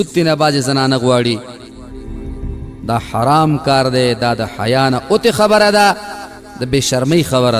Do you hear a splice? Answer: no; 0 cuts

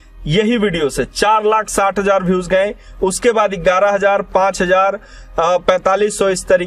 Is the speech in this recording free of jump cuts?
yes; 0 cuts

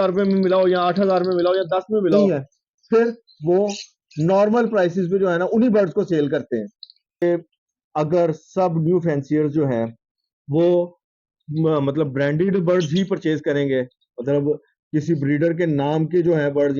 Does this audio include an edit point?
yes; 2 cuts; at 2.2 s, 7.2 s

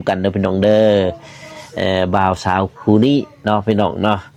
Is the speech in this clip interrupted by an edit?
no; 0 cuts

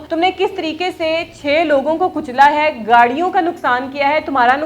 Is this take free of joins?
yes; 0 cuts

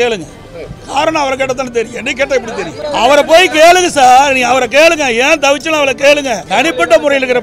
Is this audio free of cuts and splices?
no; 2 cuts; at 2.8 s, 6.4 s

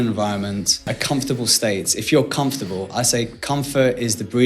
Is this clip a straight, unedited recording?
no; 1 cut; at 0.9 s

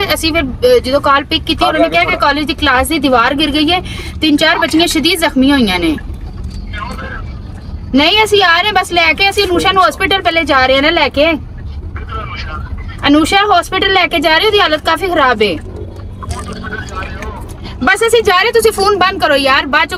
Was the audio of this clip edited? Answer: no; 0 cuts

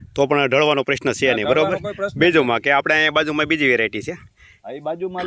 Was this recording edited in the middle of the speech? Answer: no; 0 cuts

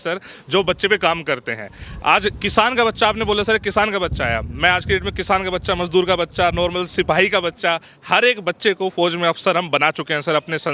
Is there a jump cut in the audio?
no; 0 cuts

